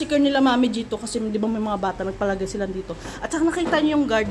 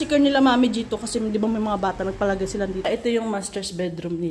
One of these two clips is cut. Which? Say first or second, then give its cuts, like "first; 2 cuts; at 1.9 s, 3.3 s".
second; 1 cut; at 2.9 s